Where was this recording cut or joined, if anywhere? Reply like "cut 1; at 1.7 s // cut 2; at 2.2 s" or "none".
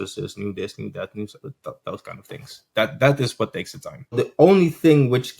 cut 1; at 4.2 s